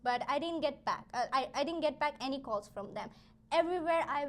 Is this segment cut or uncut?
uncut